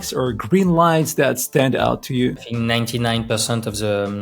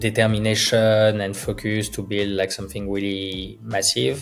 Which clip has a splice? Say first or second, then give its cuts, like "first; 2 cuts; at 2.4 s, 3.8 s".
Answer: first; 1 cut; at 2.4 s